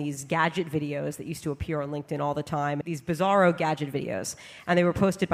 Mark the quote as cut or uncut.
cut